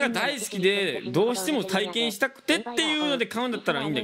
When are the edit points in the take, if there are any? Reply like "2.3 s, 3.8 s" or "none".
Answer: none